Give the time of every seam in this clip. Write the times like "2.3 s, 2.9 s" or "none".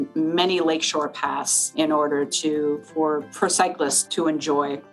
1.7 s, 3.3 s, 4.0 s